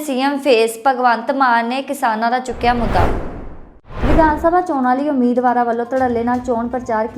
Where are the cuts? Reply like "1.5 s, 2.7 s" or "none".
none